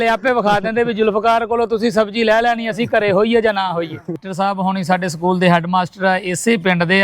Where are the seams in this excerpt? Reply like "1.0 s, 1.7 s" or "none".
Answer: 4.2 s